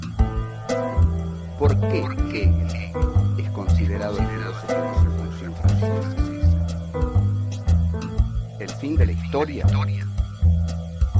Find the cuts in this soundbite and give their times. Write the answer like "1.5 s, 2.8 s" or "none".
3.8 s